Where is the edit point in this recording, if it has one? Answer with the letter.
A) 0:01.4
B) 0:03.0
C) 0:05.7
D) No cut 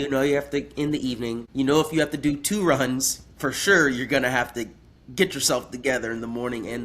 A